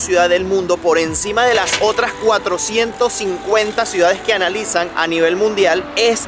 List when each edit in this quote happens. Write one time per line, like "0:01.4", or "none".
none

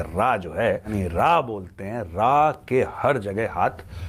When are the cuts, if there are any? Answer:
0:00.9

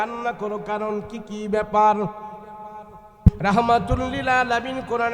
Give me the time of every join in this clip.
0:03.4

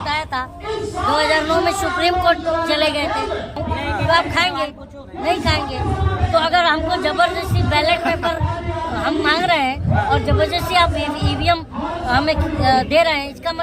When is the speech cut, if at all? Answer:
0:03.6

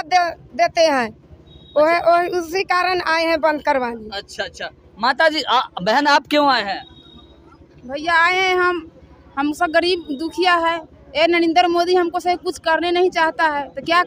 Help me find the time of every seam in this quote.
none

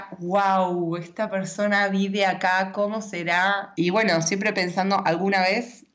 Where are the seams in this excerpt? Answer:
0:03.7

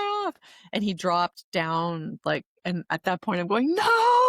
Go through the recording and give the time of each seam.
0:02.5

